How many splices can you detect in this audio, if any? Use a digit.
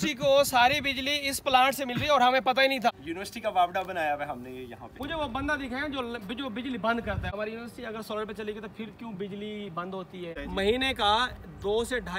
4